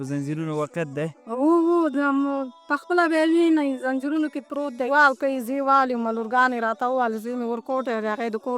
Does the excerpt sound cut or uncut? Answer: cut